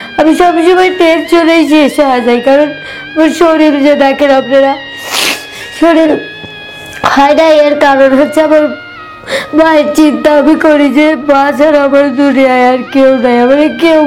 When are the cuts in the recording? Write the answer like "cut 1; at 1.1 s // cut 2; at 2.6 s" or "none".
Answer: none